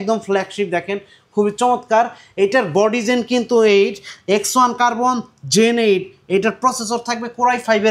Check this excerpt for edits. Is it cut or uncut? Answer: uncut